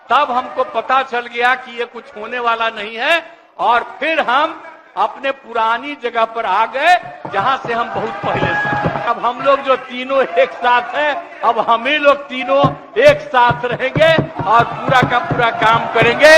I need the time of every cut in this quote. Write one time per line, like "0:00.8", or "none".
0:09.1

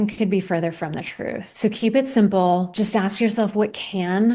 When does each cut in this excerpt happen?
0:01.4
0:02.7

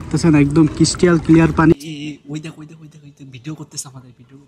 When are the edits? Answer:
0:01.7

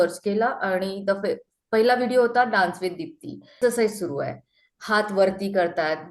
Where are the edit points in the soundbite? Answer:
0:03.5

